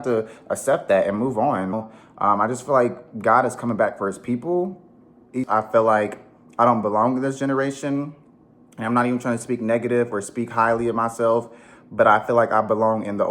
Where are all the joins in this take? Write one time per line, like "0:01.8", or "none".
0:01.7
0:05.5

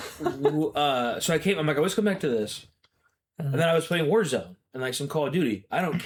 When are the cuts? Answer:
none

